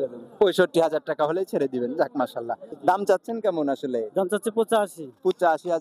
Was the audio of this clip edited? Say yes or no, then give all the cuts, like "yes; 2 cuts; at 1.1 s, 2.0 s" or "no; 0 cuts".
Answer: yes; 1 cut; at 2.7 s